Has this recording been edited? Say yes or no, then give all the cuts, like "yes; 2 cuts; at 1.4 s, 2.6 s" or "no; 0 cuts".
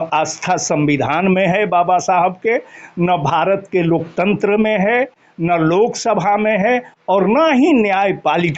no; 0 cuts